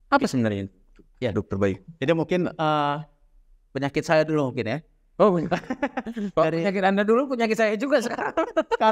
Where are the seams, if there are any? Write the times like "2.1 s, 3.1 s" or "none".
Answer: none